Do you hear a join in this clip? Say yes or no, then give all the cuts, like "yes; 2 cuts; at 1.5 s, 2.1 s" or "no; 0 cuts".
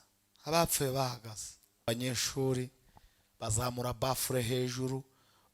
yes; 1 cut; at 1.9 s